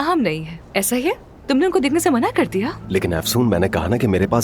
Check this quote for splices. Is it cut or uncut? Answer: uncut